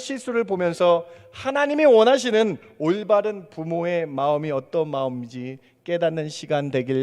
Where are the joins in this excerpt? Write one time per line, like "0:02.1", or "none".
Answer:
none